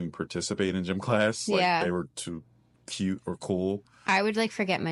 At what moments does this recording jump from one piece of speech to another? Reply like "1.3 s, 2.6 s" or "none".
none

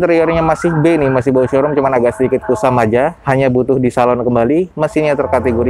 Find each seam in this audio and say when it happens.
none

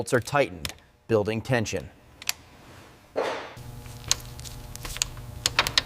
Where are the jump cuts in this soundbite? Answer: 3.6 s

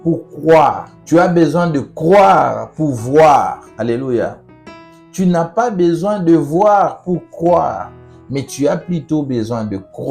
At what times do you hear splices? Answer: 0.9 s, 3.6 s

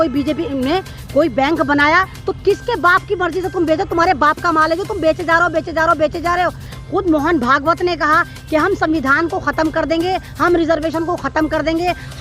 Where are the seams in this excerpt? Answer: 2.2 s, 6.7 s

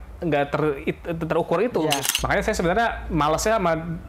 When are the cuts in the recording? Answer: 2.1 s

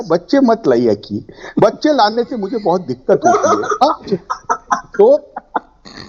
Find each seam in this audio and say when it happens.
none

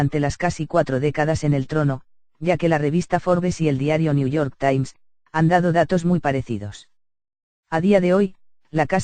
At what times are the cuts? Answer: none

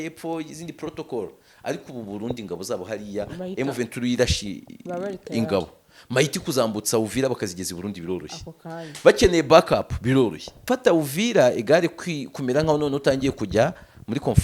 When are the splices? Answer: 10.5 s

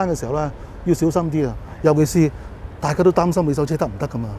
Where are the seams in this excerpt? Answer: none

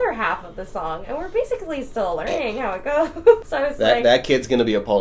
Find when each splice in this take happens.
3.5 s

